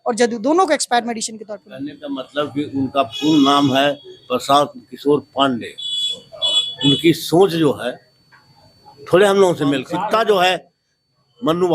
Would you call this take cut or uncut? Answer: cut